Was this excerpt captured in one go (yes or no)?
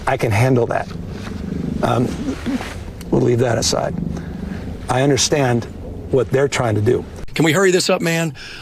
no